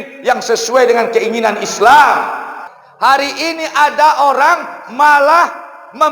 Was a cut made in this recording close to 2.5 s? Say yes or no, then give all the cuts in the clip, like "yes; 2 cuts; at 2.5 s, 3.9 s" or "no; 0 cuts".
yes; 1 cut; at 2.5 s